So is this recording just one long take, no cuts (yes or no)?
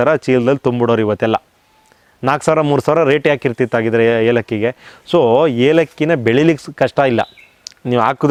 yes